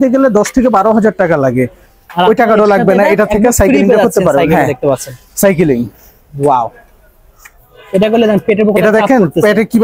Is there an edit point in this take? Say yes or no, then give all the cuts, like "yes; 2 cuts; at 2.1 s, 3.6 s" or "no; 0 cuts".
no; 0 cuts